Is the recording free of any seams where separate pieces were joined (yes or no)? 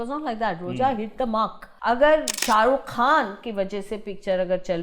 no